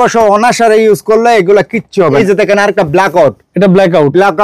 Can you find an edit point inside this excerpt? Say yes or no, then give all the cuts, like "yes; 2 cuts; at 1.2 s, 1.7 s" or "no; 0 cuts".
yes; 1 cut; at 2.2 s